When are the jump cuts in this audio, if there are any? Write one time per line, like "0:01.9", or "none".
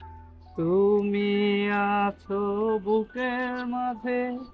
none